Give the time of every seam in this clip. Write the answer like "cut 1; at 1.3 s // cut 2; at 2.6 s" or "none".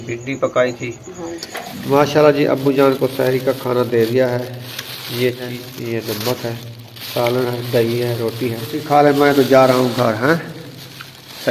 cut 1; at 1.8 s // cut 2; at 5.5 s // cut 3; at 8.8 s